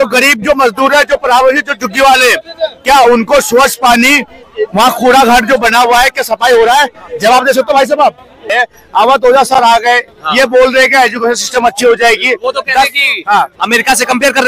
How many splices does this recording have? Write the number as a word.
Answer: one